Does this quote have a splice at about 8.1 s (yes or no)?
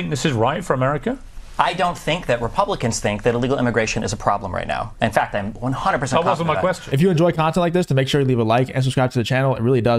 no